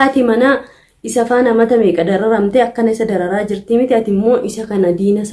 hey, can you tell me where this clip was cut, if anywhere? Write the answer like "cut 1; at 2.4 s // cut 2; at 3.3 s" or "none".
none

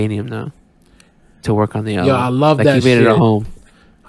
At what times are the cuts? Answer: none

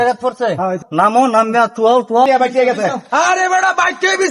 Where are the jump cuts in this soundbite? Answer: cut 1; at 0.8 s // cut 2; at 2.3 s

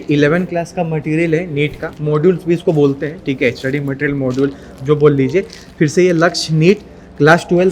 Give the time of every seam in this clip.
none

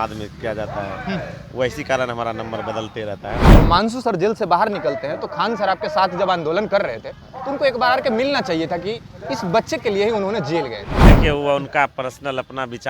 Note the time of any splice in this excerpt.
cut 1; at 3.4 s // cut 2; at 11.0 s

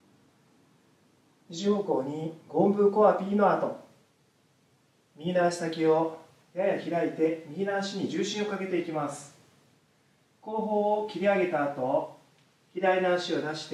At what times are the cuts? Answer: cut 1; at 1.1 s

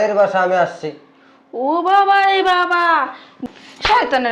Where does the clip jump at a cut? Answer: cut 1; at 3.3 s

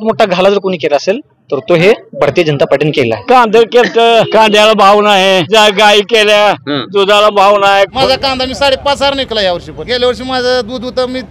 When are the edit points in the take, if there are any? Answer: cut 1; at 3.2 s // cut 2; at 4.3 s // cut 3; at 5.5 s // cut 4; at 8.0 s // cut 5; at 9.8 s

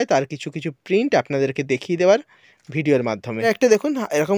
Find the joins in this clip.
cut 1; at 3.5 s

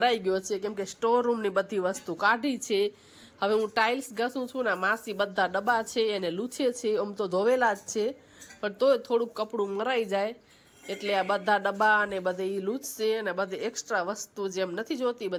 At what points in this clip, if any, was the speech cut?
none

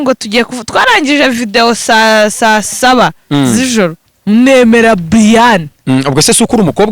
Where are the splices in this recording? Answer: cut 1; at 4.0 s

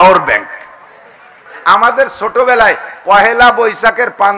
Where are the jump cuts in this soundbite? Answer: cut 1; at 1.5 s

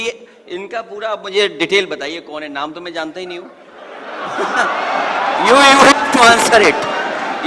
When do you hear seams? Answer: none

